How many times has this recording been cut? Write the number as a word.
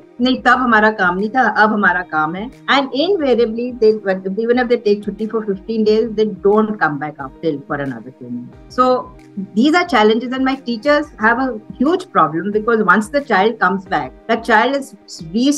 one